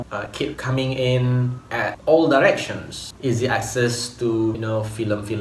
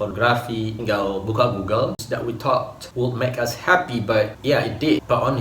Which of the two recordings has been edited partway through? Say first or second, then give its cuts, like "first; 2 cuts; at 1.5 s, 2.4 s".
second; 1 cut; at 2.0 s